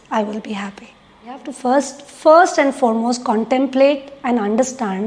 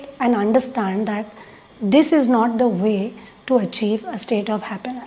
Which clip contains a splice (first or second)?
first